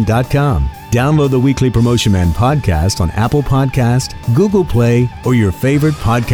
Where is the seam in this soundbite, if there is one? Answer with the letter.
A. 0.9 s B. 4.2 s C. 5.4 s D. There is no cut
B